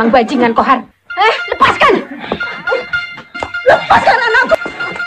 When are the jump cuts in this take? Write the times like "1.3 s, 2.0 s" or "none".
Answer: 0.9 s